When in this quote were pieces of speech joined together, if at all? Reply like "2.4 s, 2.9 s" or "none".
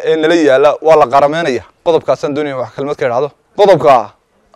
1.7 s, 3.4 s

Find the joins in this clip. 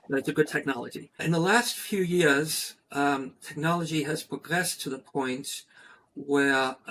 1.2 s

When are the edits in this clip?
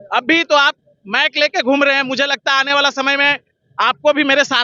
none

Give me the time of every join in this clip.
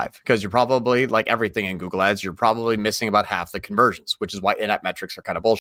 none

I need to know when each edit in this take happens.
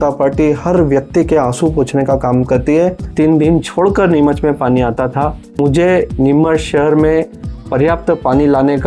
3.0 s, 5.6 s

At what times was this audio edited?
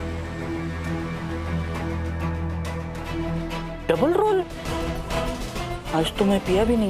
3.1 s, 4.7 s

